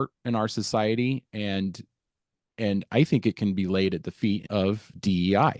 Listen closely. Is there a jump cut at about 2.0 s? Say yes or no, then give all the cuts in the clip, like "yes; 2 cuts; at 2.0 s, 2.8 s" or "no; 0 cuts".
no; 1 cut; at 4.4 s